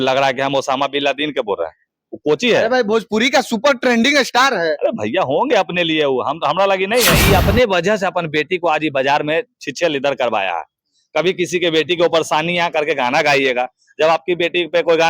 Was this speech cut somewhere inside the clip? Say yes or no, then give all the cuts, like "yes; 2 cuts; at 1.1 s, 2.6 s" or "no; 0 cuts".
yes; 1 cut; at 7.2 s